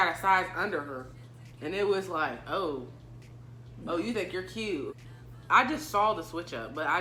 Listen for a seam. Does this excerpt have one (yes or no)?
no